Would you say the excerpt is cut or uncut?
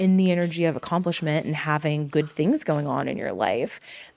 uncut